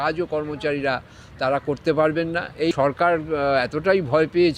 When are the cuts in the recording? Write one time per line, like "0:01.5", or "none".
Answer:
0:02.7